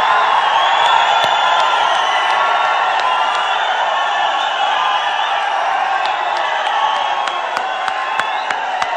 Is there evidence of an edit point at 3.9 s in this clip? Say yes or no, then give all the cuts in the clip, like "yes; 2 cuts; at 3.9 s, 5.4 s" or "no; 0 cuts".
no; 0 cuts